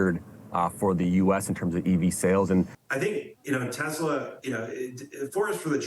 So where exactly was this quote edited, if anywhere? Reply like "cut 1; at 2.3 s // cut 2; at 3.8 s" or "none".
cut 1; at 2.8 s